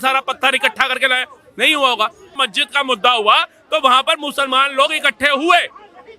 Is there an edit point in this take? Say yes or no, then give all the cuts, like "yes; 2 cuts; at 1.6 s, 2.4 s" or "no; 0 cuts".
yes; 1 cut; at 2.3 s